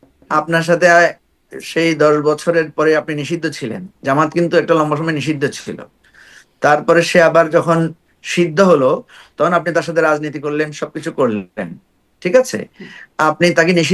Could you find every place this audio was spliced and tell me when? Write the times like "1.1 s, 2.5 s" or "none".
none